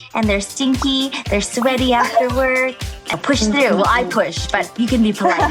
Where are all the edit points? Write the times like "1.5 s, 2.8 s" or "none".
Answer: 3.2 s